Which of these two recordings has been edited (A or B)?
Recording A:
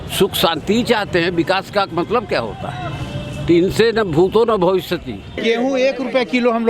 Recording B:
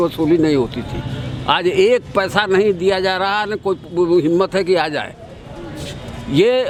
A